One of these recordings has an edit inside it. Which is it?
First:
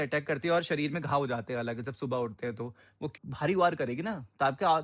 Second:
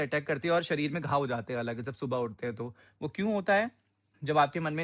first; 1 cut; at 3.1 s

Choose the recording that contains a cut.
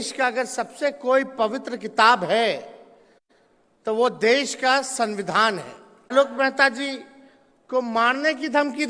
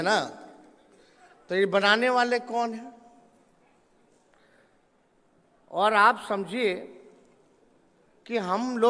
first; 1 cut; at 6.1 s

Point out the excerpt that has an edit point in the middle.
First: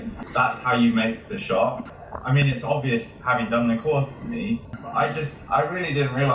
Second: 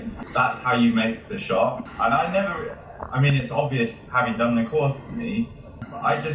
first; 2 cuts; at 1.9 s, 4.8 s

